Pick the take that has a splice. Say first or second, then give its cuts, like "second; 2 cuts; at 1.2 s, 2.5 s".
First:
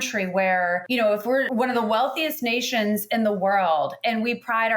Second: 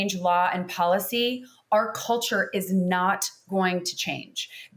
first; 1 cut; at 1.2 s